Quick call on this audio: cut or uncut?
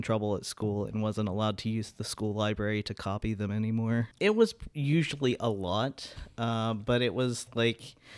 cut